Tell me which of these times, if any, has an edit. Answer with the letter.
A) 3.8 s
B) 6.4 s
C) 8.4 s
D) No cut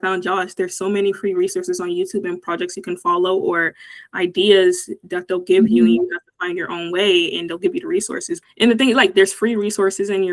C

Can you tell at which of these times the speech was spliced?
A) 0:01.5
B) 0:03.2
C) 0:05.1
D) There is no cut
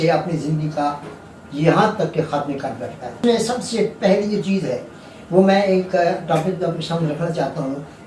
B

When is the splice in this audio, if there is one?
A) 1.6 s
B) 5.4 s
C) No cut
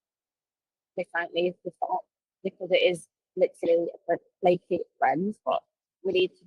B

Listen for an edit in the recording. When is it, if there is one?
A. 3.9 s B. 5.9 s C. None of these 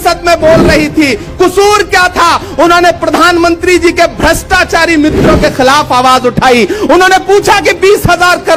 C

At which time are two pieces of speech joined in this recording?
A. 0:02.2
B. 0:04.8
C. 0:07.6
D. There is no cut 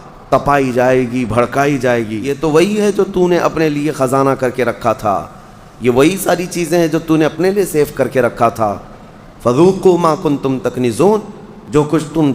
A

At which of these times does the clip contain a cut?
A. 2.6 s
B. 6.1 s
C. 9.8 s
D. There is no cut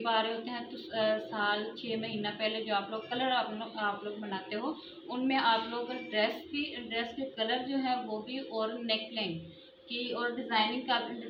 D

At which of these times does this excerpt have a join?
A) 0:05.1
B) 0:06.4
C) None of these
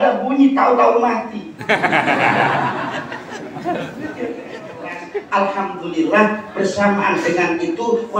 A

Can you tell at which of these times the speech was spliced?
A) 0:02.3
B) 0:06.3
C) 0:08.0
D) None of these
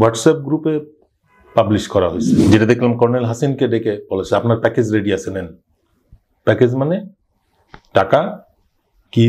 A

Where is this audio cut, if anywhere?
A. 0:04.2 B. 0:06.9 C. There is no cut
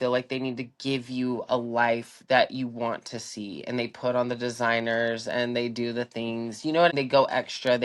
B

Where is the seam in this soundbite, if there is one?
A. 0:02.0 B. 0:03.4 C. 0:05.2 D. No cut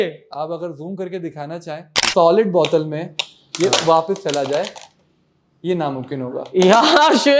A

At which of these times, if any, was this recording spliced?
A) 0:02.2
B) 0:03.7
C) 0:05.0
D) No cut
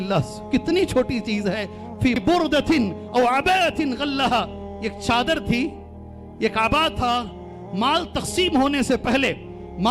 A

